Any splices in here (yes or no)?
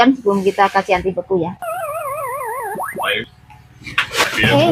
no